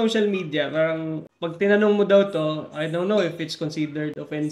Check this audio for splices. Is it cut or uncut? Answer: cut